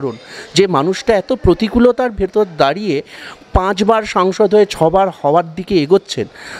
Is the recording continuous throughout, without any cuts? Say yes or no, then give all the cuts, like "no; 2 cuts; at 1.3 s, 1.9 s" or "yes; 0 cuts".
yes; 0 cuts